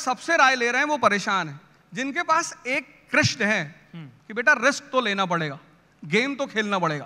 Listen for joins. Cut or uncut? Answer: uncut